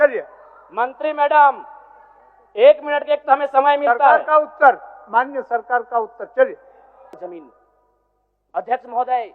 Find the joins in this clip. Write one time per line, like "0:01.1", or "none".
0:07.1